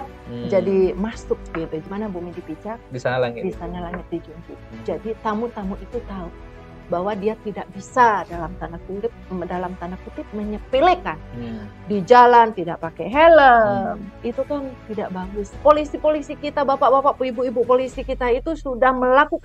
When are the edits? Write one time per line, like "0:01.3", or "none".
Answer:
0:01.8
0:15.3